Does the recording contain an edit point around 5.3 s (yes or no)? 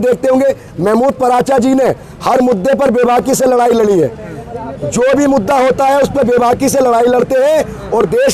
no